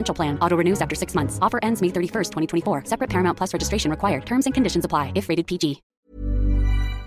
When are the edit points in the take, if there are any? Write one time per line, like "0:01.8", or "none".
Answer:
0:05.8